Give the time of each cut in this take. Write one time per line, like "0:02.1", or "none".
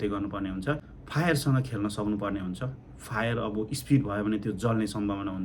0:00.9